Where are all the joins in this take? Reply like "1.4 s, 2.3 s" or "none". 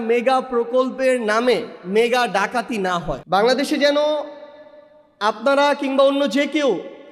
3.2 s

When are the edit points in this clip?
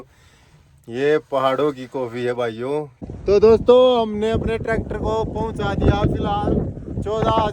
3.0 s

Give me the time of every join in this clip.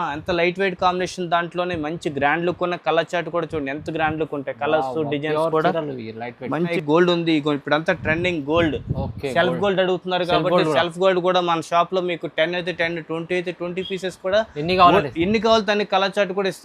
6.7 s

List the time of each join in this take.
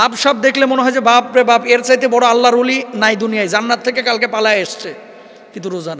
none

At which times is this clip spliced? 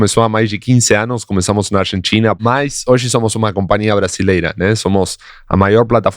2.4 s

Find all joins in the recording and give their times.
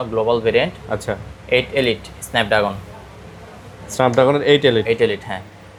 none

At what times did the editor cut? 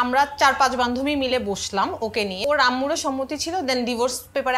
2.4 s

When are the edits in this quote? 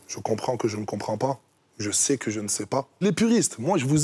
3.0 s

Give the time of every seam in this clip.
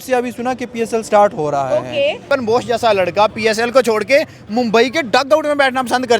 2.3 s

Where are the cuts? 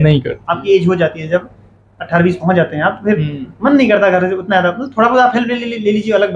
none

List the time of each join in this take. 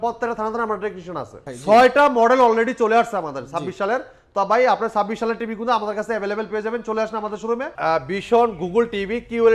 1.5 s, 7.7 s

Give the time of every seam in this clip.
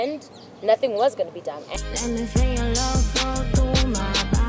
1.7 s

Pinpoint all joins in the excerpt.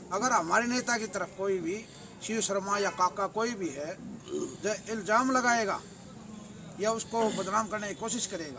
none

